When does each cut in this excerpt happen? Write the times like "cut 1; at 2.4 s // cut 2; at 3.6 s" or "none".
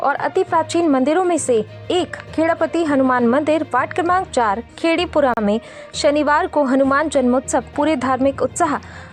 none